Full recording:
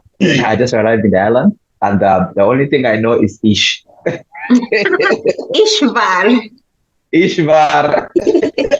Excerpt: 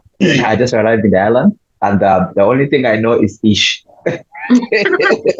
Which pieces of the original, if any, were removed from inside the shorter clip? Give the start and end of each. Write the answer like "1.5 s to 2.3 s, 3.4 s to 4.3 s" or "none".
none

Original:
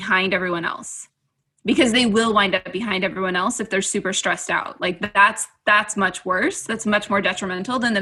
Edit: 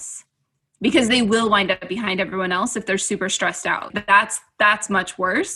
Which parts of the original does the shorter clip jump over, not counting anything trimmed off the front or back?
4.7 s to 5.0 s

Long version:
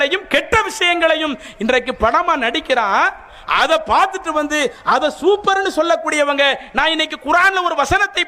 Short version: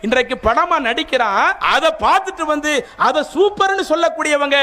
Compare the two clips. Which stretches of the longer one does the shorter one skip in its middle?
3.2 s to 3.5 s

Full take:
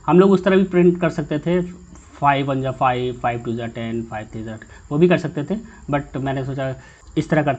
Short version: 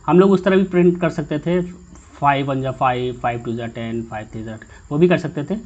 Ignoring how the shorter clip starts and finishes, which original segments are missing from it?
none

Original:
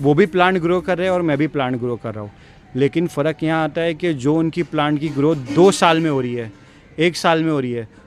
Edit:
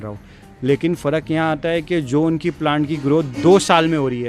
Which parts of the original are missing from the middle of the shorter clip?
none

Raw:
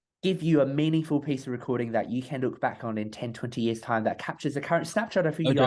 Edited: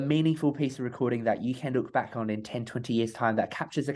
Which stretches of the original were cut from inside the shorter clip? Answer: none

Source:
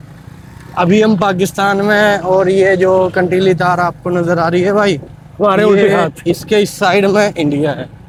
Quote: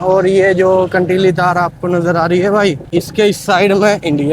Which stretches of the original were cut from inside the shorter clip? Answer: 5.1 s to 6.2 s

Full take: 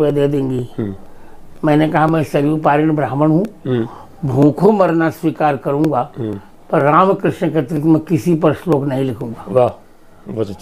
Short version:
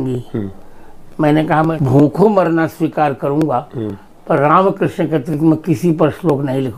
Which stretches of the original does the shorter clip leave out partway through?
2.2 s to 4.2 s

